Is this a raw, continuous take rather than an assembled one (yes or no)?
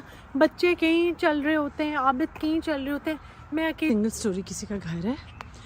no